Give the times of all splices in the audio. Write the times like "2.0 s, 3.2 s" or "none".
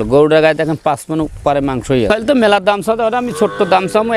2.1 s